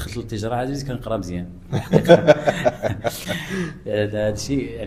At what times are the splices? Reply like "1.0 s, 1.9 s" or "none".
none